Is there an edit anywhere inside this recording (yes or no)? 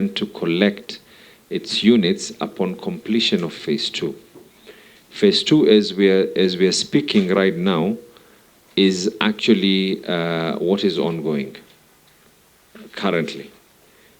no